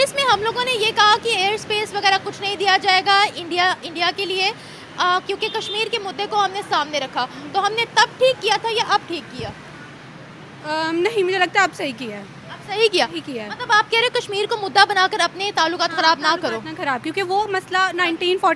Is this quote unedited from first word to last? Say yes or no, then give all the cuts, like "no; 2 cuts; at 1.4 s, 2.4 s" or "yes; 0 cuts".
yes; 0 cuts